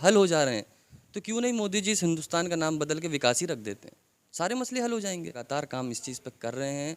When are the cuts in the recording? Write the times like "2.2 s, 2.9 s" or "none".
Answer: 5.5 s